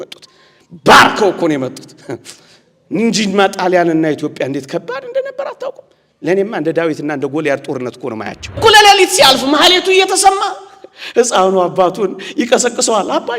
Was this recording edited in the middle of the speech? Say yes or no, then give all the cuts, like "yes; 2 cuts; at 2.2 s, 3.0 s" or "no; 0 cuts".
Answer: yes; 1 cut; at 8.6 s